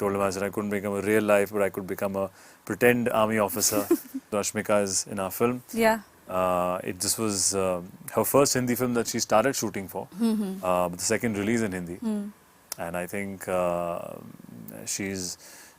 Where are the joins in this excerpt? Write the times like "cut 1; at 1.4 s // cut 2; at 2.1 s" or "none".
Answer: cut 1; at 4.3 s